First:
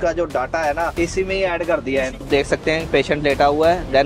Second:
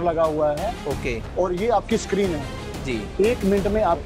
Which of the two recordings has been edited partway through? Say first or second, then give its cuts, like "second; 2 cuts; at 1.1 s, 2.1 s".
first; 2 cuts; at 0.9 s, 2.2 s